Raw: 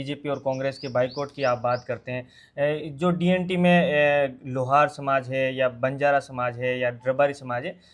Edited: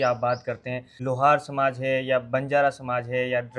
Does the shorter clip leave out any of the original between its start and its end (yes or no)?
yes